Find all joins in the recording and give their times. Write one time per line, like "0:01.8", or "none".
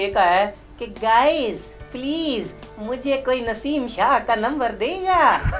none